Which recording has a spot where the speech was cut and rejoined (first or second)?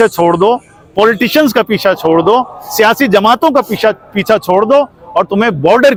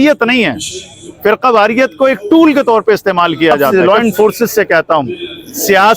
second